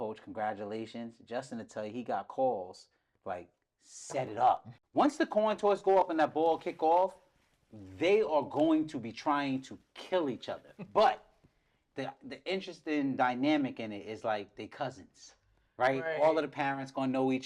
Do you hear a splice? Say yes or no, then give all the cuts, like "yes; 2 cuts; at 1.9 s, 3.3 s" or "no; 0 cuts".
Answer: yes; 1 cut; at 4.8 s